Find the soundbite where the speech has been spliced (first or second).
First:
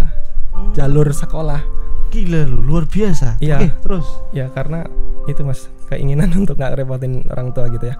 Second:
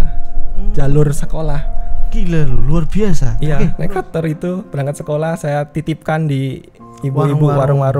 second